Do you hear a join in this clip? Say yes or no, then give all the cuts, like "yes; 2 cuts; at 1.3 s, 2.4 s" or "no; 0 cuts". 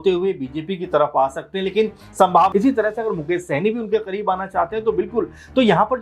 yes; 1 cut; at 2.5 s